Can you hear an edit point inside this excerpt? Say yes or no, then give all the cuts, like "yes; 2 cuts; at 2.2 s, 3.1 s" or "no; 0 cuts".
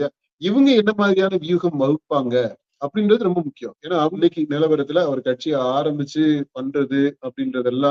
yes; 1 cut; at 4.2 s